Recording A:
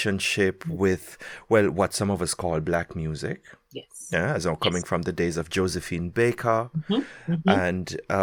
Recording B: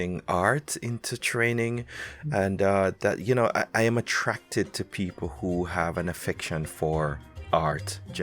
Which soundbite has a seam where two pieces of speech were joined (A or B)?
B